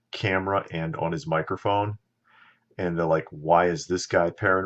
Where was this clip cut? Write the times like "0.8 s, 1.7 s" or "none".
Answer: 3.3 s